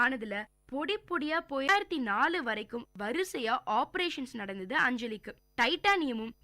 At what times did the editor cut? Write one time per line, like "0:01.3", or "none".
0:01.7